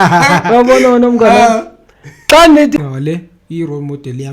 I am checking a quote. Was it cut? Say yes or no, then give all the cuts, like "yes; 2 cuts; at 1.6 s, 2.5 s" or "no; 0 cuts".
yes; 1 cut; at 2.8 s